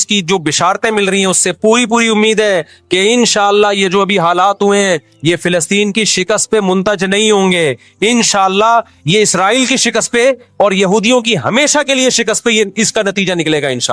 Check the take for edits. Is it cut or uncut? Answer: uncut